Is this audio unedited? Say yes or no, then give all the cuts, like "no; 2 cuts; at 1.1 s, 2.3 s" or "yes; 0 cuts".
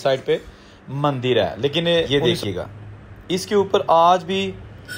no; 1 cut; at 2.1 s